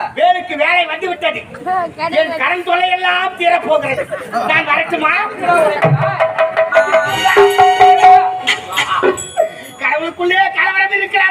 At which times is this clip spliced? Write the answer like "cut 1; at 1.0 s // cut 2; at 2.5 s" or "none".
cut 1; at 7.1 s